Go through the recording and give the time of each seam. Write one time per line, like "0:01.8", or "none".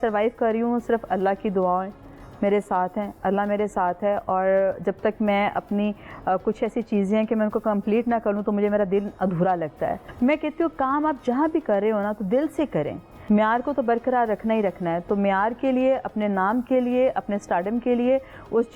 0:10.0
0:13.1